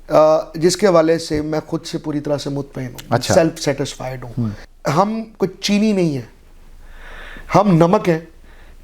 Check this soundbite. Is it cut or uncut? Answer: cut